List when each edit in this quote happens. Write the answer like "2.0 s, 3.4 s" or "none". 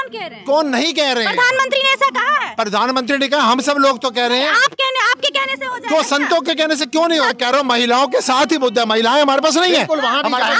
7.3 s